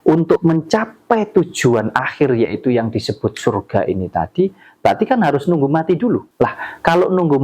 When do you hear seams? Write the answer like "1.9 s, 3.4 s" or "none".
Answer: 6.3 s